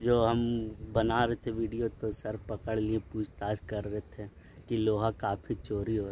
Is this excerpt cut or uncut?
uncut